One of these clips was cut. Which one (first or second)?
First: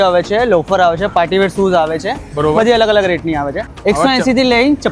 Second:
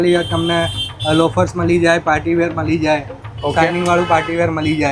first